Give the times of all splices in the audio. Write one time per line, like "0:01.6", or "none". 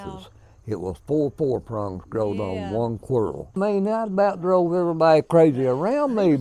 0:03.6